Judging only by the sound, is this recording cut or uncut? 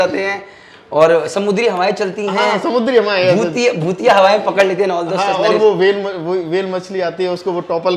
uncut